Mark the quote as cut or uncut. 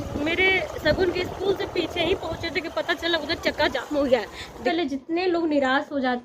cut